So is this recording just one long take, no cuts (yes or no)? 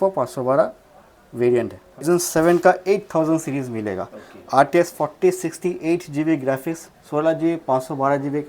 no